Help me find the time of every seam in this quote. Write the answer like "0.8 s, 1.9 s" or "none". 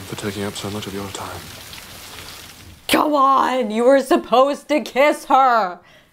2.7 s